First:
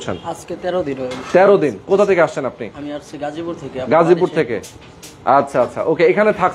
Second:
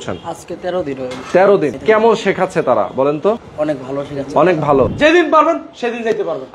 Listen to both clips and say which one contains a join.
second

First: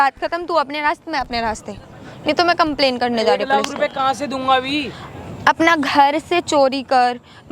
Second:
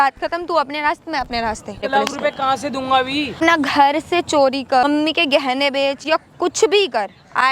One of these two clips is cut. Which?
second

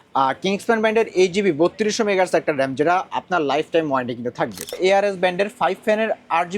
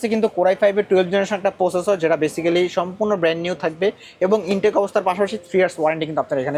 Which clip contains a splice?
first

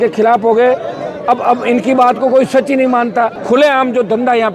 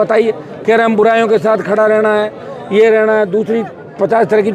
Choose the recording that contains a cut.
first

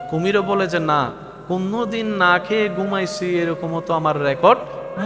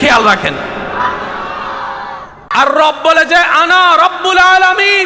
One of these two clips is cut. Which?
second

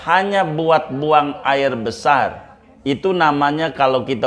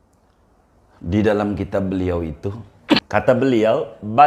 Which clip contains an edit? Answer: second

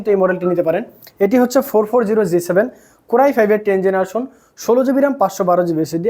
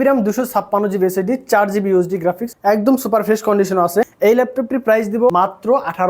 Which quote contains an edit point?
second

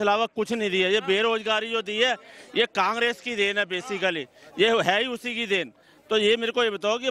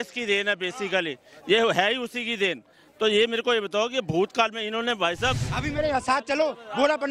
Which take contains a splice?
second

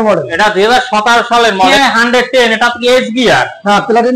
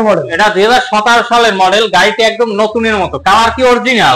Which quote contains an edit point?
first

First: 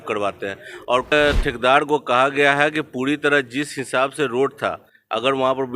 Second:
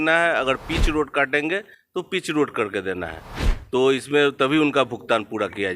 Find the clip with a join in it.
first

